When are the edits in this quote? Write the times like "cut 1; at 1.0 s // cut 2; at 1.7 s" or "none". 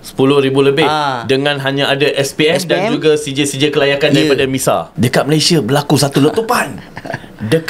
cut 1; at 4.9 s